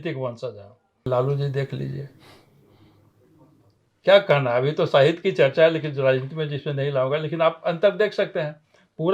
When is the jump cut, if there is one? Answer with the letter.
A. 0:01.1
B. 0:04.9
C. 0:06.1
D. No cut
A